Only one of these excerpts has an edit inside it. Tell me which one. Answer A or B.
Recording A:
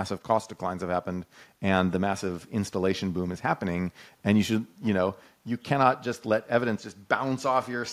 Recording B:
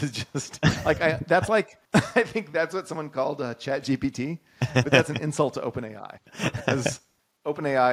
B